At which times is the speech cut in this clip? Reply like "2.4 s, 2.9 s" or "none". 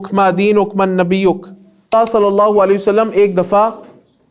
1.9 s